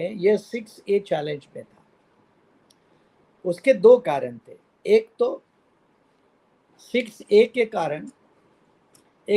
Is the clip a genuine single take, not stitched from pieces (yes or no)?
yes